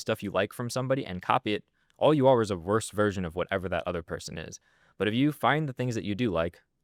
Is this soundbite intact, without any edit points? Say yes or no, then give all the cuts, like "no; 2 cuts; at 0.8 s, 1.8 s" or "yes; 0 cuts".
yes; 0 cuts